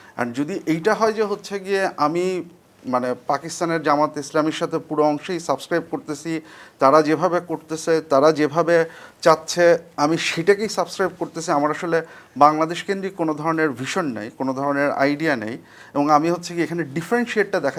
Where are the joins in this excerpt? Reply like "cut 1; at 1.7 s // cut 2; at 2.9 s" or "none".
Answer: none